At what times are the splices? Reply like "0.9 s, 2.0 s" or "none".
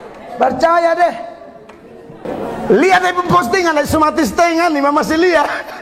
2.2 s